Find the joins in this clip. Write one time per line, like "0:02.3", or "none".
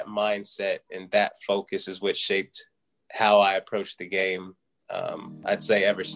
none